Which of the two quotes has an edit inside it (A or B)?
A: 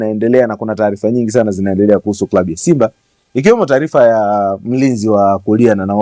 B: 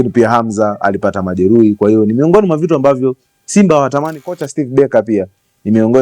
B